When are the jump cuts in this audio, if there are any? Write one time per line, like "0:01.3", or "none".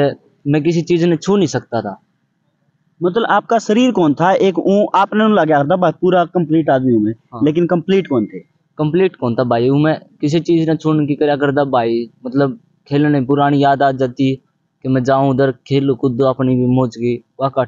none